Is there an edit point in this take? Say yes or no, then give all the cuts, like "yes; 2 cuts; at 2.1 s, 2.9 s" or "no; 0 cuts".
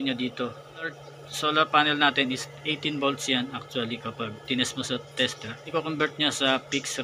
yes; 2 cuts; at 1.1 s, 5.7 s